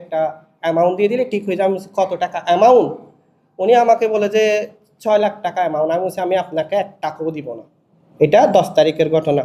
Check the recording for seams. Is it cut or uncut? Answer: uncut